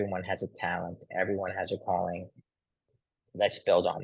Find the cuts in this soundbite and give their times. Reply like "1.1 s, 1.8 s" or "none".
2.9 s